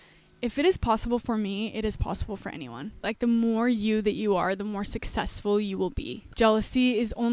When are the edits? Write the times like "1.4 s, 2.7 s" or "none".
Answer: 3.1 s, 6.3 s